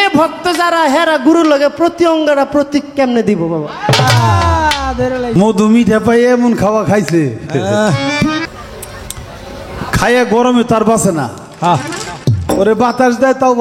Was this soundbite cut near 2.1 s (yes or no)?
no